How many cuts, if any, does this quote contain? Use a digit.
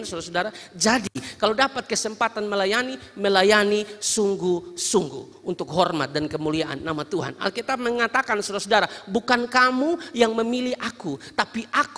0